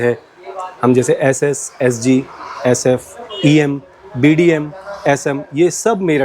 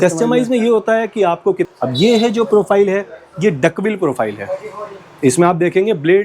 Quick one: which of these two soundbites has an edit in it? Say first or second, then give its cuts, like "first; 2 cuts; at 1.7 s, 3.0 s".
second; 1 cut; at 1.6 s